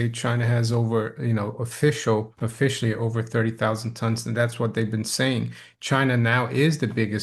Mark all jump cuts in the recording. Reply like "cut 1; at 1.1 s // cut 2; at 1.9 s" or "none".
cut 1; at 2.4 s